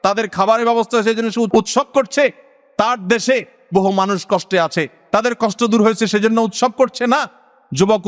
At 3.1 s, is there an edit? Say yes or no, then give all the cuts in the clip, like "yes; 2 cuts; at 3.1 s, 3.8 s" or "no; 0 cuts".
no; 1 cut; at 1.5 s